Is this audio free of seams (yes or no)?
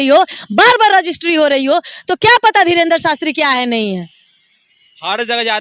yes